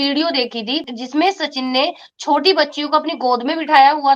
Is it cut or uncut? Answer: cut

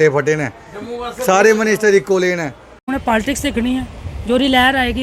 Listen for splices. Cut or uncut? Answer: cut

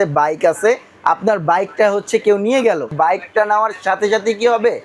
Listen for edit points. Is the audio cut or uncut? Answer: cut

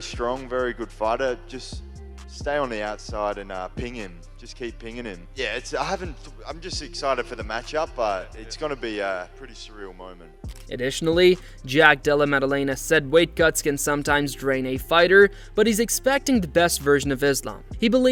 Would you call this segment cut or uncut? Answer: uncut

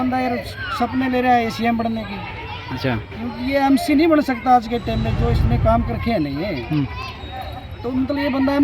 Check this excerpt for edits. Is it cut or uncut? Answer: uncut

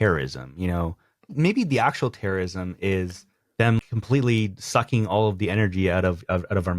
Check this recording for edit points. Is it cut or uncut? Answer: cut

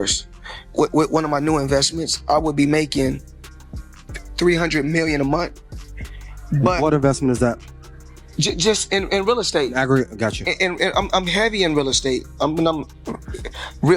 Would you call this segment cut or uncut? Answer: uncut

